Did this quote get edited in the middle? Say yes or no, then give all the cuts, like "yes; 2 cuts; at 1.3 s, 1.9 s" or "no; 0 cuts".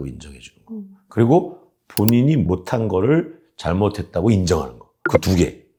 no; 0 cuts